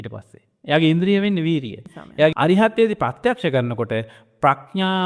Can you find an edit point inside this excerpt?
yes; 1 cut; at 2.3 s

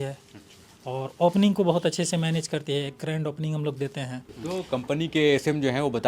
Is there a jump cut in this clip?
yes; 1 cut; at 4.3 s

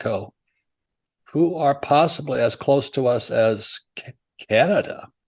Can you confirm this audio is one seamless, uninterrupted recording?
yes; 0 cuts

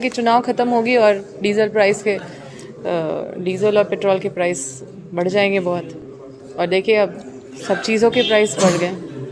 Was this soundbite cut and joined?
no; 0 cuts

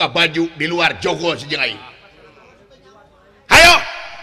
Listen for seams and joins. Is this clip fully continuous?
no; 1 cut; at 3.0 s

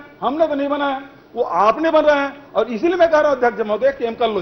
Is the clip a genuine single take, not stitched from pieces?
yes; 0 cuts

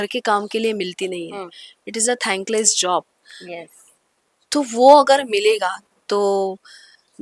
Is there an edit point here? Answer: no; 0 cuts

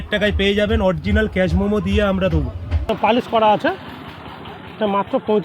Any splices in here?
yes; 1 cut; at 2.9 s

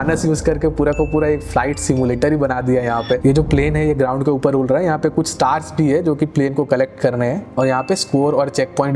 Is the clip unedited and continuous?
no; 2 cuts; at 3.2 s, 7.4 s

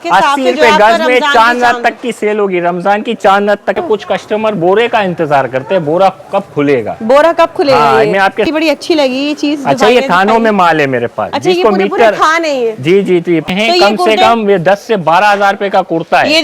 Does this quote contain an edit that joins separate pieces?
yes; 3 cuts; at 3.8 s, 8.5 s, 13.5 s

